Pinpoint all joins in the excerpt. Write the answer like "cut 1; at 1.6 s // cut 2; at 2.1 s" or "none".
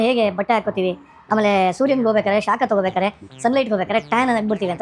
none